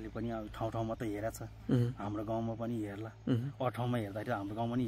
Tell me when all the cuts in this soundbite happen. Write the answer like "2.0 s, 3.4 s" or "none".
none